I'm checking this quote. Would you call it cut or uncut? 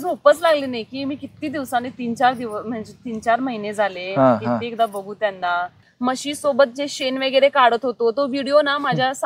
cut